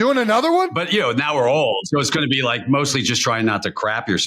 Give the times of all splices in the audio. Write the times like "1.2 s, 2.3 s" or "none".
0.8 s, 1.8 s